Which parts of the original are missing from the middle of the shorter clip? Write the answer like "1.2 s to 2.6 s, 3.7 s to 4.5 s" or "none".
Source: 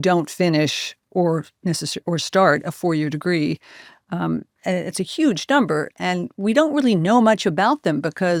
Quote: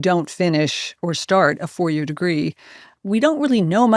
0.9 s to 1.9 s, 4.0 s to 6.3 s